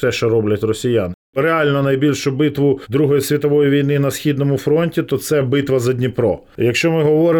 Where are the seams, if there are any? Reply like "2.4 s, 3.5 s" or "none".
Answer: 1.3 s, 2.8 s, 6.5 s